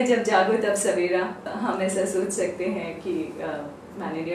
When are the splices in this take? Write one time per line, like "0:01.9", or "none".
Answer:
0:01.5